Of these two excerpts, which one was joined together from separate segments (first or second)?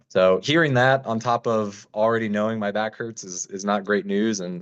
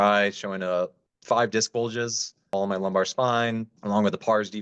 second